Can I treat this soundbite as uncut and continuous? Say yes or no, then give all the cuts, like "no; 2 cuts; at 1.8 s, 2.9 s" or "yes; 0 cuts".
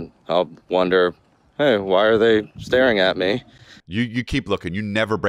no; 1 cut; at 3.8 s